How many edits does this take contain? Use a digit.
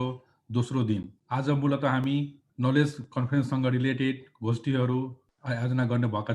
3